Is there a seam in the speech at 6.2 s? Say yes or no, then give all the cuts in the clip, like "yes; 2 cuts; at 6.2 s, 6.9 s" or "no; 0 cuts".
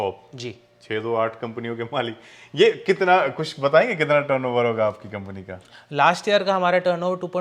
no; 0 cuts